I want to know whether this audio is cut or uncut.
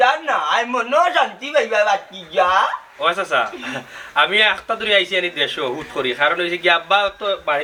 uncut